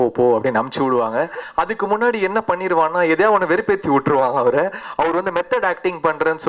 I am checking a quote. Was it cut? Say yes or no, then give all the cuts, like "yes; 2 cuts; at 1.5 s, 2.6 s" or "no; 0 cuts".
yes; 1 cut; at 1.4 s